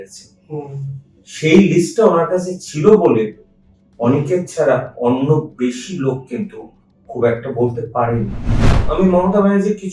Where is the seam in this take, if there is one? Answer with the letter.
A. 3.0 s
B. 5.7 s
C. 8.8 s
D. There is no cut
C